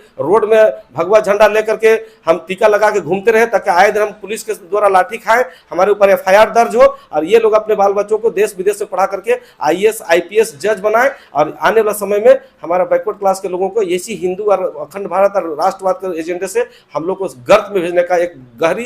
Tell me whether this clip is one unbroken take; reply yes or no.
yes